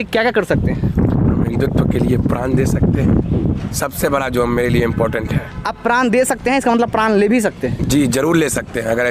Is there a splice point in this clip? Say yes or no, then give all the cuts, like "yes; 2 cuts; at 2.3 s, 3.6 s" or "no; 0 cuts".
no; 0 cuts